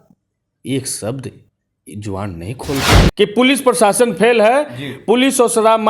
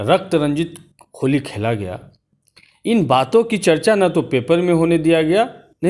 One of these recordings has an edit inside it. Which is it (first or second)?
first